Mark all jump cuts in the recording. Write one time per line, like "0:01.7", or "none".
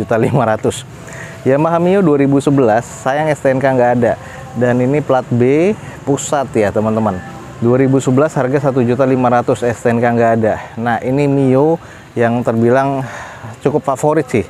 none